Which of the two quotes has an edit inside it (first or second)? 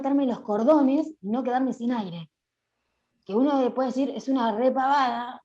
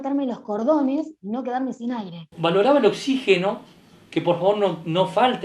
second